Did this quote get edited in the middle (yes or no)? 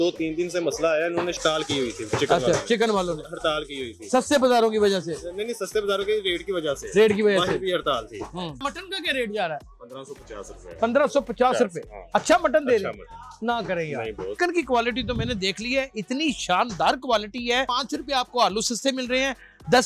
yes